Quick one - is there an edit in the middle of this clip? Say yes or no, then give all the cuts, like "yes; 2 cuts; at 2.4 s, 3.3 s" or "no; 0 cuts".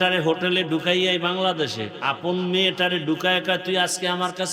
no; 0 cuts